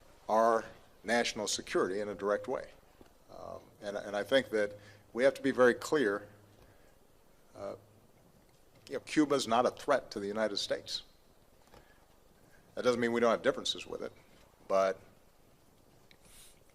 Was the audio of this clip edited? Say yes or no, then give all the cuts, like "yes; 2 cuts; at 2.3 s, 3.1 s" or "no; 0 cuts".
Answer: yes; 1 cut; at 13.4 s